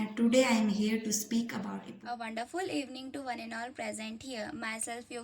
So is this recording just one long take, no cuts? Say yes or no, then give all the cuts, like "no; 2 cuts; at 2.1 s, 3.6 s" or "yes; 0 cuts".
no; 1 cut; at 1.9 s